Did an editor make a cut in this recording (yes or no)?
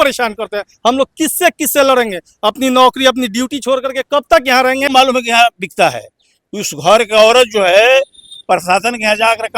yes